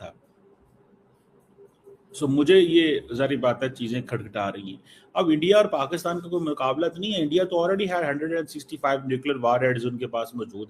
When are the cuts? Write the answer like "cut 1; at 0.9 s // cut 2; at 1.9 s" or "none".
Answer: none